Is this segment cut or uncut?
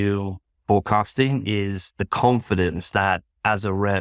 uncut